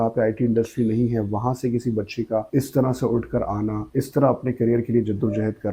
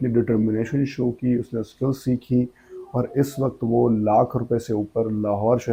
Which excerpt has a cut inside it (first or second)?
first